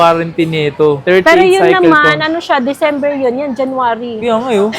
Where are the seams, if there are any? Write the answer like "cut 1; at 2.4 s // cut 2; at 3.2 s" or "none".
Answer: cut 1; at 1.0 s